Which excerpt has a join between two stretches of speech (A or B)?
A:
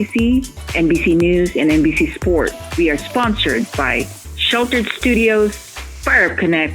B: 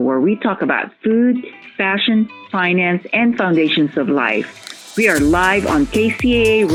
A